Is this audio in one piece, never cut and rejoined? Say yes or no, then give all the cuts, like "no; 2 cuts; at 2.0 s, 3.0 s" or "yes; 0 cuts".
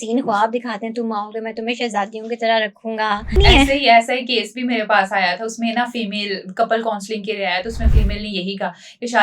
no; 1 cut; at 3.4 s